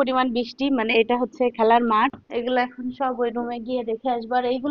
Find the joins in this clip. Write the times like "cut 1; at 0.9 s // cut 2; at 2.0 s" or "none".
cut 1; at 2.3 s